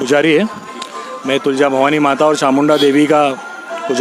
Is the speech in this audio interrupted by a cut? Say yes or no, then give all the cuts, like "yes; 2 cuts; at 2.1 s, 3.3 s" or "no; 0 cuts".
no; 0 cuts